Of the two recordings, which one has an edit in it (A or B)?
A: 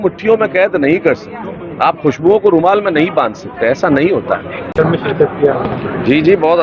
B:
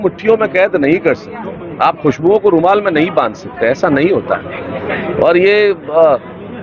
A